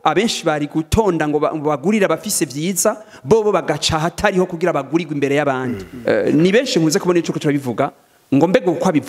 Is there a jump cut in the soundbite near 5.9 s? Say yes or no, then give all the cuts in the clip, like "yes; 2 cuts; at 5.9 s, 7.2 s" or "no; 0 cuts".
yes; 1 cut; at 5.9 s